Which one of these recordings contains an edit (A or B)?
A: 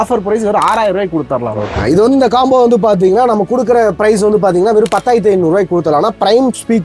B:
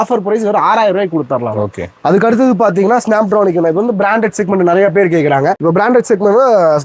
A